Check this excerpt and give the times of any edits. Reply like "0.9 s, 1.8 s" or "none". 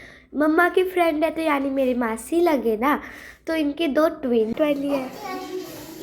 4.5 s